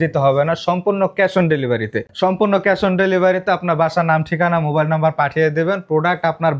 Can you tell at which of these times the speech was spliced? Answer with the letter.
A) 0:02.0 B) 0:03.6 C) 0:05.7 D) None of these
A